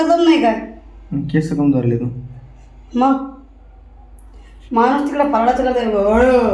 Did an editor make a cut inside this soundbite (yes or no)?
no